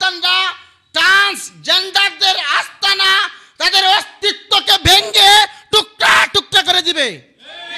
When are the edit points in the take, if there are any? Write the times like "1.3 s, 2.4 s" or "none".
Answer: none